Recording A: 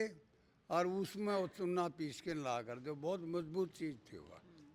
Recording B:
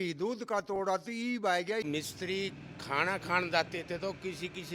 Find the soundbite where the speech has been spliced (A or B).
B